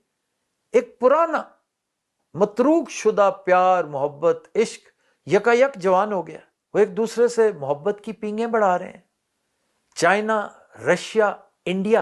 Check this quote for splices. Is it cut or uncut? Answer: uncut